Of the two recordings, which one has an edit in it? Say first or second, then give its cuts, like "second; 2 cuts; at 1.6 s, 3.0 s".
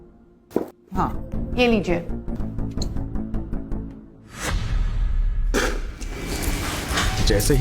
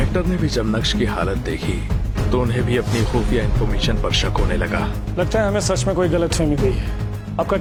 first; 2 cuts; at 1.2 s, 2.4 s